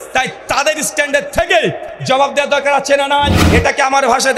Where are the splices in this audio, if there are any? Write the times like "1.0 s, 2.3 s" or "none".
3.4 s